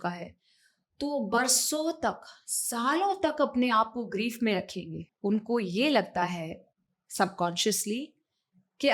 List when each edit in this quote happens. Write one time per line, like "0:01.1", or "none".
0:05.0